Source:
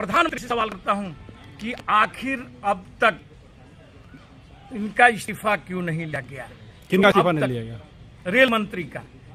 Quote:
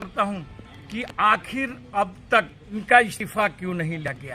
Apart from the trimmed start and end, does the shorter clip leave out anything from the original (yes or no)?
yes